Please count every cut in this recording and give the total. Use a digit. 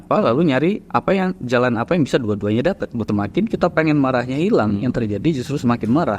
1